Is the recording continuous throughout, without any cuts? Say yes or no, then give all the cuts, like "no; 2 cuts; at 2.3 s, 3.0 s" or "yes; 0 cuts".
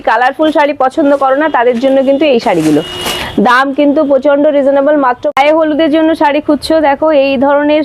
no; 1 cut; at 5.2 s